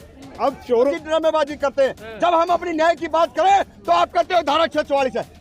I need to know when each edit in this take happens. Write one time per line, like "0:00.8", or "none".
0:00.9